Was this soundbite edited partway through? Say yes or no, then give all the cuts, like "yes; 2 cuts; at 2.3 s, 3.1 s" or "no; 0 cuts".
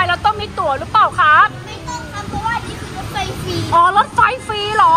no; 0 cuts